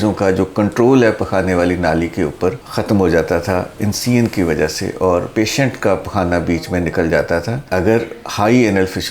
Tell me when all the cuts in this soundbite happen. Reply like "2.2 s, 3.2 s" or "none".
2.6 s